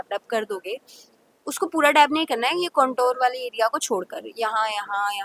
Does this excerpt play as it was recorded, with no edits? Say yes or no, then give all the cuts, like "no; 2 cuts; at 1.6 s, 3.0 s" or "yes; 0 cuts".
yes; 0 cuts